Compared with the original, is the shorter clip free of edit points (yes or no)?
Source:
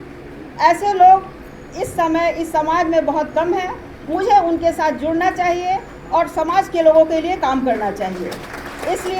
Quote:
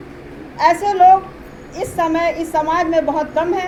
yes